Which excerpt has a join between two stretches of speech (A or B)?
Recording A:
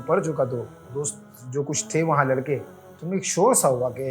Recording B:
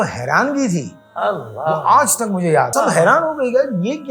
B